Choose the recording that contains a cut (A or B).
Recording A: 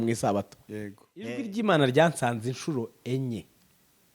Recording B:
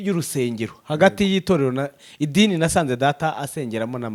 A